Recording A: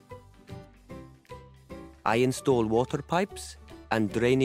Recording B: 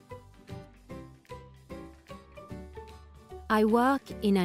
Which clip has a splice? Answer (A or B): B